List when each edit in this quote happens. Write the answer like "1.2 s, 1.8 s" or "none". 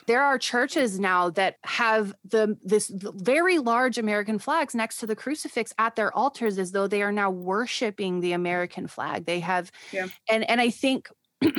1.5 s